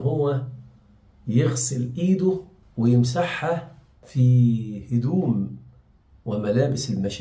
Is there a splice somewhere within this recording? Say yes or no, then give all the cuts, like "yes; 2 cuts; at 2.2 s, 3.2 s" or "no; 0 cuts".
no; 0 cuts